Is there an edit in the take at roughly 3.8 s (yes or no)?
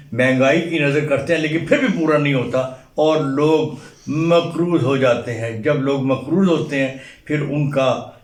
no